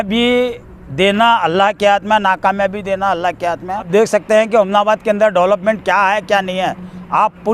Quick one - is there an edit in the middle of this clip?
yes; 1 cut; at 3.9 s

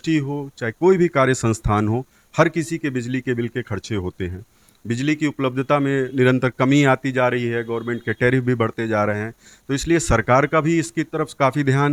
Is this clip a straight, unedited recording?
yes; 0 cuts

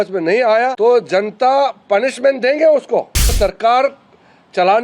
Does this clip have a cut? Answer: yes; 2 cuts; at 0.7 s, 3.3 s

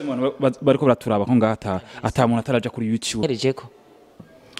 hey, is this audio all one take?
no; 1 cut; at 3.2 s

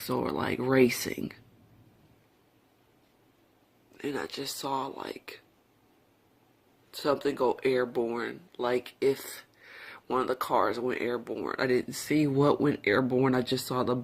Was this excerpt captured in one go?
no; 1 cut; at 3.6 s

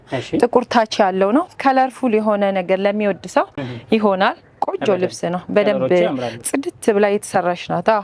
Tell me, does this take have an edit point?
no; 0 cuts

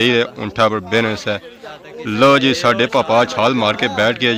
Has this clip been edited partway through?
no; 0 cuts

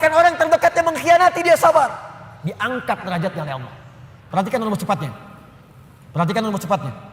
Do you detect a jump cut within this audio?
yes; 1 cut; at 4.2 s

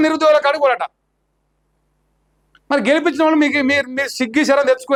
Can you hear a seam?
no; 0 cuts

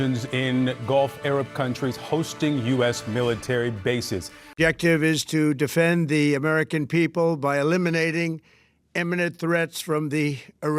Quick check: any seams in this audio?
yes; 1 cut; at 4.5 s

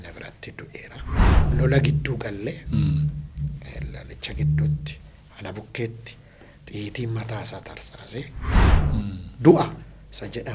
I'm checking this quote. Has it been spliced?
yes; 2 cuts; at 1.3 s, 8.7 s

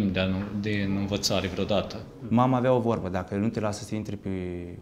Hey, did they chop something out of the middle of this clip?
yes; 1 cut; at 2.2 s

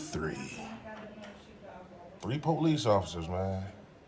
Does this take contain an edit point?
no; 0 cuts

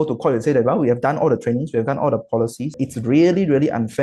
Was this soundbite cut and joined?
yes; 1 cut; at 2.7 s

